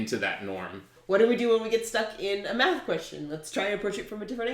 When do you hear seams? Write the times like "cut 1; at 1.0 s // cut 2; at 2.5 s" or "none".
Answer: cut 1; at 0.9 s